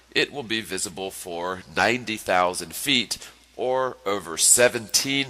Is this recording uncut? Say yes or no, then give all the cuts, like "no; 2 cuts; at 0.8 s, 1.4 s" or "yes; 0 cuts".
yes; 0 cuts